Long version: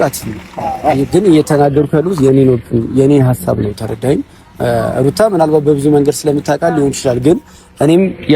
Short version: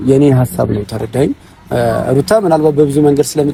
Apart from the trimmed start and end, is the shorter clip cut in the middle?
no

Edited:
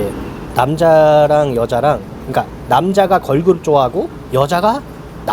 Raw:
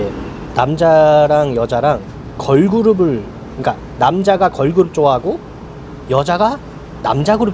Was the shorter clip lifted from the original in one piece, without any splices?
no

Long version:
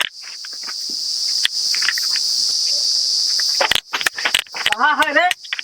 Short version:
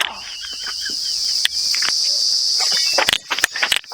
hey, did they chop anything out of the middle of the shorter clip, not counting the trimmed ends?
yes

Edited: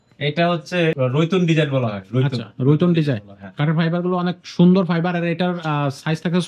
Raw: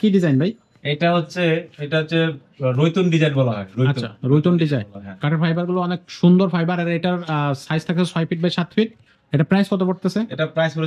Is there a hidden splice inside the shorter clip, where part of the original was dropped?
yes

